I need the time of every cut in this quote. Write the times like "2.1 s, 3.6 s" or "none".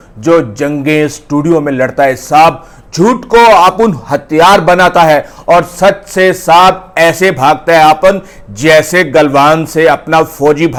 none